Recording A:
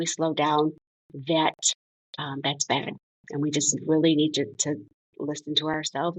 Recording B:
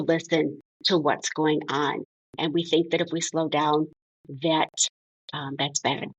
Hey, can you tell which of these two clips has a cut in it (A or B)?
B